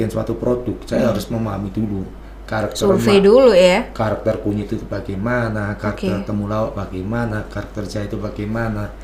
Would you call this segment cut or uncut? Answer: uncut